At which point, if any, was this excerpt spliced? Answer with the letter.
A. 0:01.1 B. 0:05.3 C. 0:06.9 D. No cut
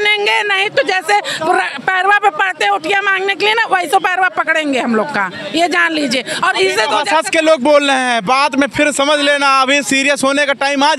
D